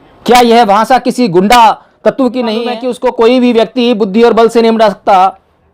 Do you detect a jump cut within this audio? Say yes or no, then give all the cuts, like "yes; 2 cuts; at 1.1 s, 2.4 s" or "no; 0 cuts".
yes; 1 cut; at 2.6 s